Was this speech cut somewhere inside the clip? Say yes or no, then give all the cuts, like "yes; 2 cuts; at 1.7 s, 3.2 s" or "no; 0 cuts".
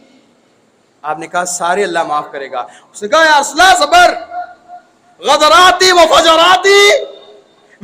no; 0 cuts